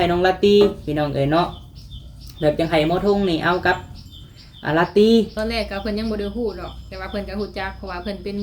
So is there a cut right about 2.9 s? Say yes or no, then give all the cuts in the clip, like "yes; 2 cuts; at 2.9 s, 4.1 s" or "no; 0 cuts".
no; 1 cut; at 5.3 s